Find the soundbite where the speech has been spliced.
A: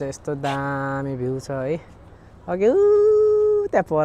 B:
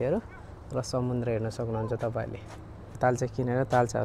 B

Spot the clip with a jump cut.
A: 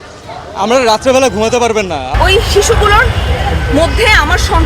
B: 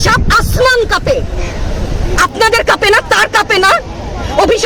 A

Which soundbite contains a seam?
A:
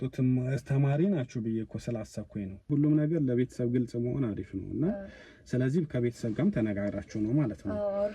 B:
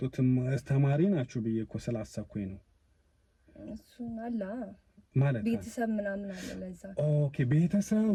A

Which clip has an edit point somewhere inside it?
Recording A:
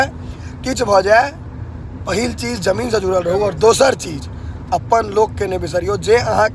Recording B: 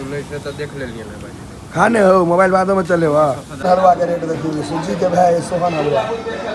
B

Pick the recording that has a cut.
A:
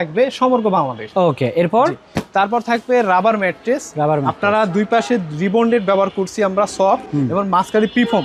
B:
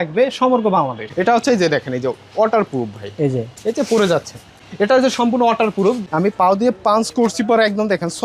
B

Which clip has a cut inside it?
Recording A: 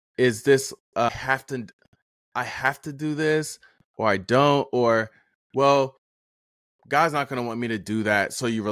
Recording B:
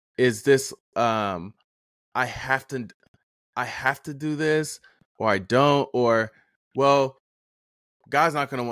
A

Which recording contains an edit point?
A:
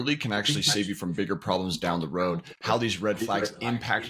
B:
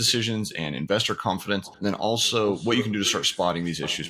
B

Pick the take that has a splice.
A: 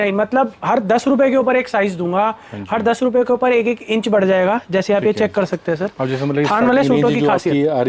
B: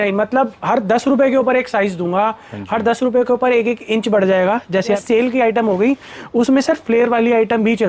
B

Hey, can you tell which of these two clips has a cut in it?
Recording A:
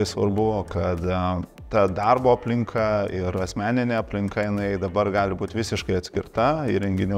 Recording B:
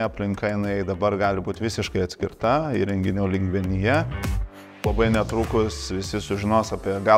B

